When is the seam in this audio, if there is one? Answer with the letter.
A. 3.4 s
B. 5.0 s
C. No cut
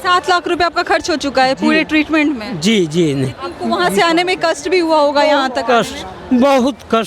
A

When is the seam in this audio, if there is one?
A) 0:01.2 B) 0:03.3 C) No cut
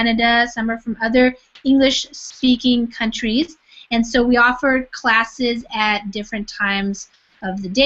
A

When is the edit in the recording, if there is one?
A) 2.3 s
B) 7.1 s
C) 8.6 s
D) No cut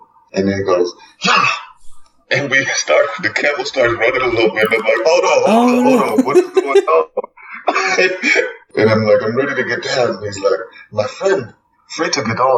C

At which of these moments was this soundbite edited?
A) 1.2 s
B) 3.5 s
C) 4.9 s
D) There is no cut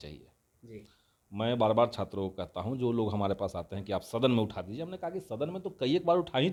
D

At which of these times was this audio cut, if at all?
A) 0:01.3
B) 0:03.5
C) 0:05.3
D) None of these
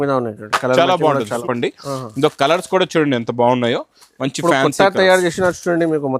A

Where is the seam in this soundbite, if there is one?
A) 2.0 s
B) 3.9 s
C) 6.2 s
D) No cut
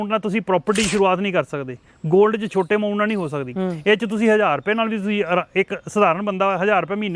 D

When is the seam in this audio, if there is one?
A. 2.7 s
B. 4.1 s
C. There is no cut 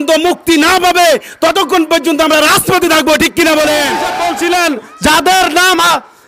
B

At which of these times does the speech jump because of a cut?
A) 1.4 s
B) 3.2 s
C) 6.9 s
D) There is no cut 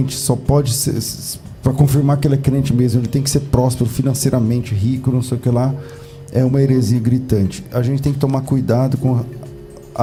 D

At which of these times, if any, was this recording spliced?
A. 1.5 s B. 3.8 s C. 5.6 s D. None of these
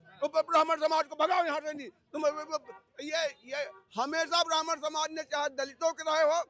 D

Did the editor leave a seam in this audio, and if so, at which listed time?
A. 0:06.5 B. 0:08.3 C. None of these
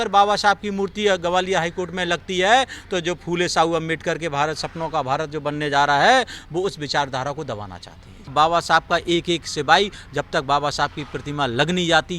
B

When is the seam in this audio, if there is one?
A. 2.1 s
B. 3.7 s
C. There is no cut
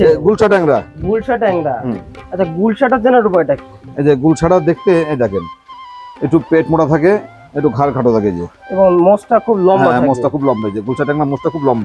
A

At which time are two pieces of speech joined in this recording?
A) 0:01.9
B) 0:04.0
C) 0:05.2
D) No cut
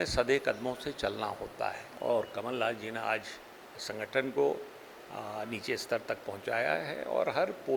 A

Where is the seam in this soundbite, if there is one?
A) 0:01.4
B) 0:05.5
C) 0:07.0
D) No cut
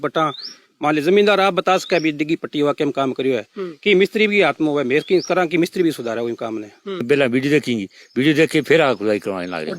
C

